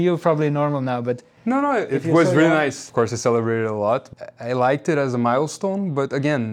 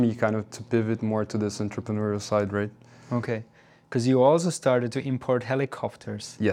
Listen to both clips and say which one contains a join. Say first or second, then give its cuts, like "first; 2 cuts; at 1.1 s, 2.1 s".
first; 2 cuts; at 2.8 s, 4.1 s